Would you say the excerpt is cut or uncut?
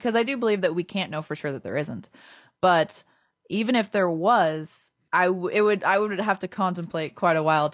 uncut